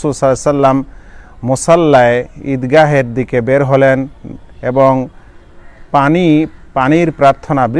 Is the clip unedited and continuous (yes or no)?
yes